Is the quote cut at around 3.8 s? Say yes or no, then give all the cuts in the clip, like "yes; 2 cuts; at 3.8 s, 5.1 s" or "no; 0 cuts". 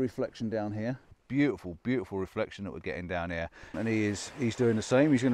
yes; 2 cuts; at 1.1 s, 3.8 s